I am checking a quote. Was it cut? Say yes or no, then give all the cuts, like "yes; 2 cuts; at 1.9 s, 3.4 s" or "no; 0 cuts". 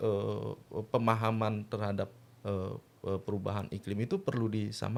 no; 0 cuts